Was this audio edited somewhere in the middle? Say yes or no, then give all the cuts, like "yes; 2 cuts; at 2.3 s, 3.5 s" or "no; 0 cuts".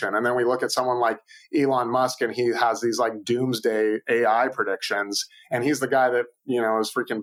no; 0 cuts